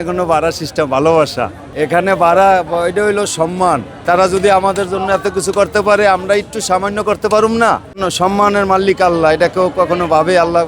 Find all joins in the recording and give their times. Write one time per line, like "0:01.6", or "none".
0:01.6
0:03.9
0:08.0

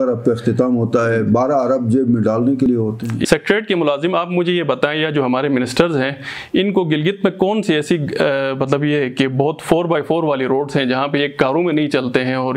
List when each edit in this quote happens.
0:02.7

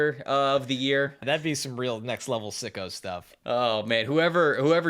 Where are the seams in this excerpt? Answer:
0:01.2
0:03.3

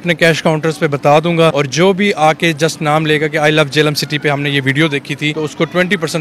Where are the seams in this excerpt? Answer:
0:01.5
0:05.3

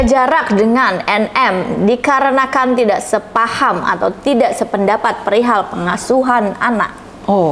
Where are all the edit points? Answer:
none

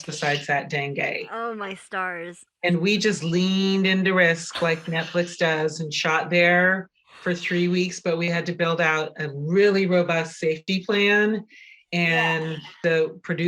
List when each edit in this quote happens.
0:10.6

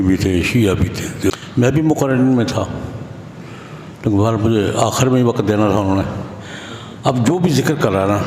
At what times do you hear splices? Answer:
0:01.3

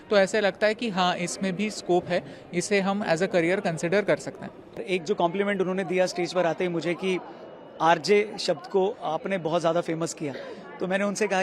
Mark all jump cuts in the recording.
none

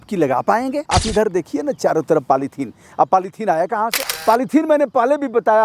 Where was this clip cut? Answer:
0:00.8
0:04.1

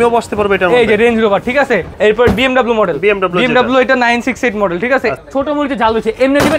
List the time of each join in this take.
0:01.9
0:05.1

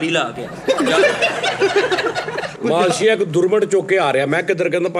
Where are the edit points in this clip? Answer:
0:02.5

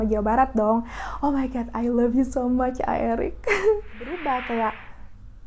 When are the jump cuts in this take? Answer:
0:04.1

